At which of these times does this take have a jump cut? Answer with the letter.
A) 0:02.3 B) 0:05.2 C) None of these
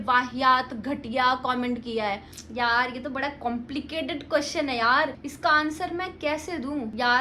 A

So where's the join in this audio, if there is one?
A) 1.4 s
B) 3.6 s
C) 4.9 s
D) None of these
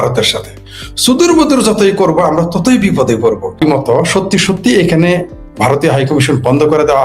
B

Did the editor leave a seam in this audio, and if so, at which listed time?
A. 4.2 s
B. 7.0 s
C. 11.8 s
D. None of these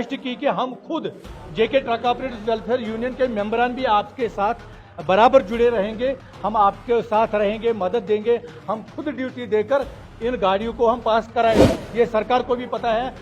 C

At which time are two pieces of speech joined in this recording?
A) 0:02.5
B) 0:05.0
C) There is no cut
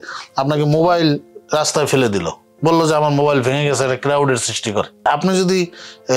B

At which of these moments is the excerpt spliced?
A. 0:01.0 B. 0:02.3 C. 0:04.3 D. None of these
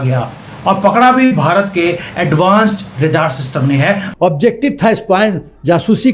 C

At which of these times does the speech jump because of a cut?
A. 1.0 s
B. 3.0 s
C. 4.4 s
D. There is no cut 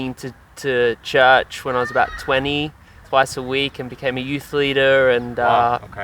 B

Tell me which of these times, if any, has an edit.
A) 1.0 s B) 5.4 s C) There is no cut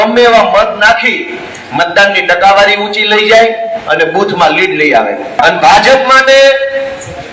B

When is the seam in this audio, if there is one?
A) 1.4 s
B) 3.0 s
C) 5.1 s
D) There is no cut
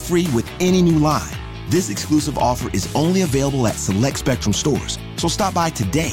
D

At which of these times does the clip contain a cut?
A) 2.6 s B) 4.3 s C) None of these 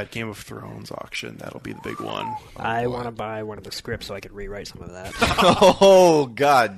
C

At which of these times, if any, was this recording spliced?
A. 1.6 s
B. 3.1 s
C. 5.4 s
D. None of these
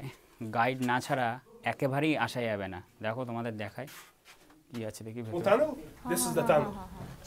C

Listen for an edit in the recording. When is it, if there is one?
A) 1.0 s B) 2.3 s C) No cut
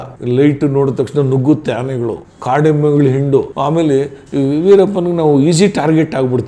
B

